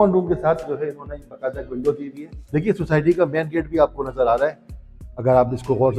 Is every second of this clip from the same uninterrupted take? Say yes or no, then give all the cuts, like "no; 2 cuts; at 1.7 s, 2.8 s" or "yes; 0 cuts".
yes; 0 cuts